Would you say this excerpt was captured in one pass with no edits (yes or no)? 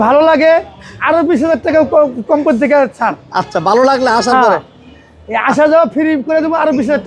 yes